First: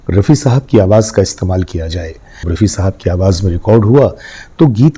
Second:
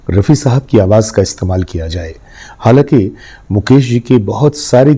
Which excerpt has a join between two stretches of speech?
first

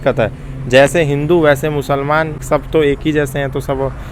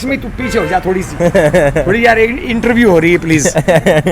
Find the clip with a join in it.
first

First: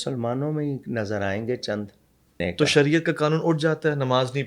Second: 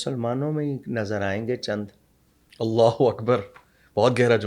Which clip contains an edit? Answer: first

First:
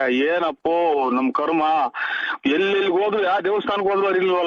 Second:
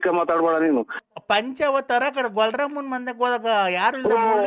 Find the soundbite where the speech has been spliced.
second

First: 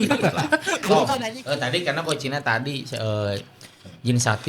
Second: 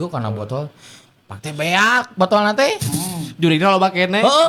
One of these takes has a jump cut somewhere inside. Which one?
first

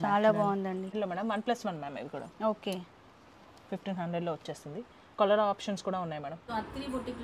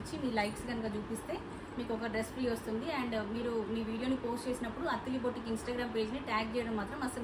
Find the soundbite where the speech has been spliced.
first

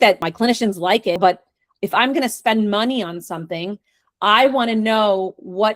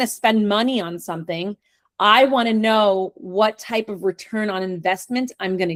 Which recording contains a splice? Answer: first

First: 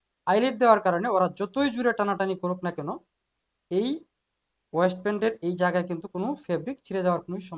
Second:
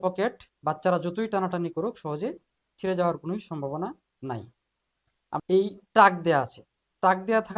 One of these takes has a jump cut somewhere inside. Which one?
second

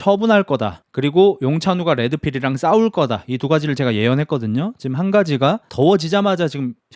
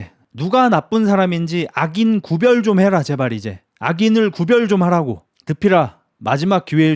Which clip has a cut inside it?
first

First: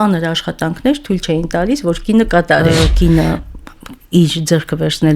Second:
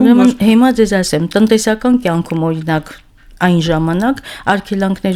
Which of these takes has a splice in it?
first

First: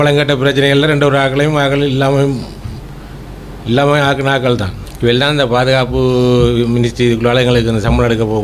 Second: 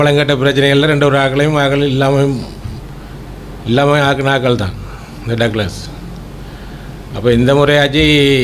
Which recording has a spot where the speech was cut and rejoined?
first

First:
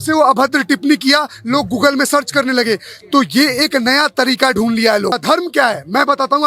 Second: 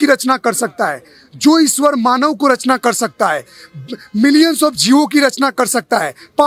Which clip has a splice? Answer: first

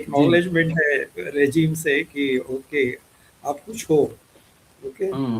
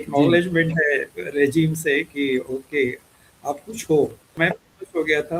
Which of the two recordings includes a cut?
second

